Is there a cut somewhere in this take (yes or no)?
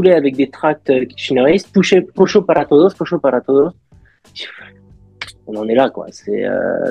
no